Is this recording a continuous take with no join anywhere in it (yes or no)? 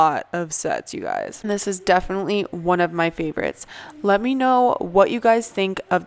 yes